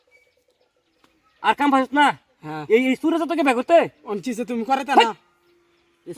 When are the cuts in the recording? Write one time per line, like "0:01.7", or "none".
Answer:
0:00.9